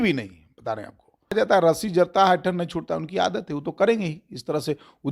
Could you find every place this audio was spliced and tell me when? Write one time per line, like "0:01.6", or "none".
0:01.3

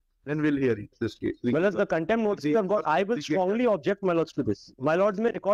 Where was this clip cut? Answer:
none

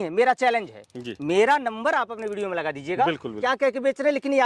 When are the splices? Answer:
0:03.4

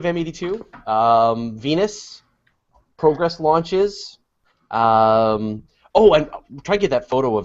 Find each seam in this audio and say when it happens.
0:06.1

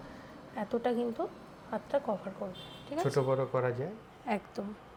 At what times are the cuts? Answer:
none

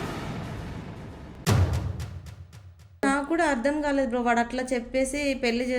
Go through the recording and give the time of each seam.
0:03.0

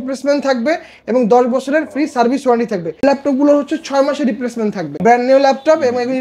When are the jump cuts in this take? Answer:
0:03.0
0:04.9

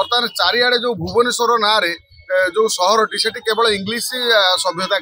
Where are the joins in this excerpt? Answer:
none

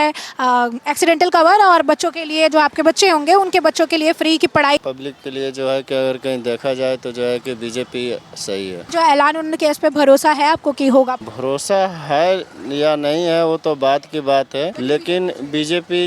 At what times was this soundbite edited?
0:04.8
0:08.9
0:11.3
0:14.8

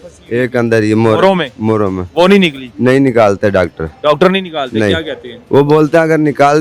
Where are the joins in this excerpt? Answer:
none

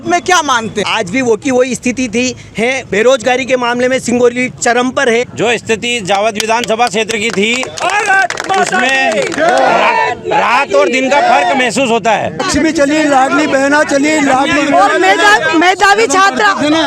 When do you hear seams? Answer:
0:00.9
0:02.8
0:05.3
0:12.4

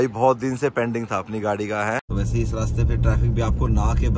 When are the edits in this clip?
0:02.1

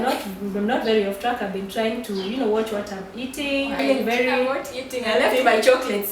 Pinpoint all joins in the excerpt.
0:03.8

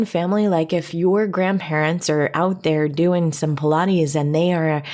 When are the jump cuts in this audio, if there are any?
0:00.9

